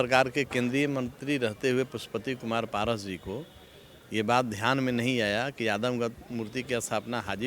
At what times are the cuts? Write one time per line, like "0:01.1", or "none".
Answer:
none